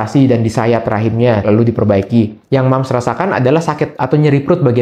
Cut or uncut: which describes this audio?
cut